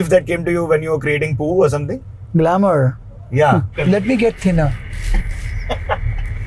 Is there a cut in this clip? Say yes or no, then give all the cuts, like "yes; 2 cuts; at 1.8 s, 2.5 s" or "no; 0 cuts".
yes; 1 cut; at 3.7 s